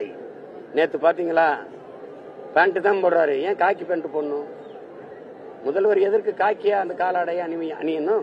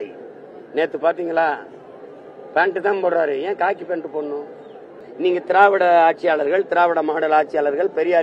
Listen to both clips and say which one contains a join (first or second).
second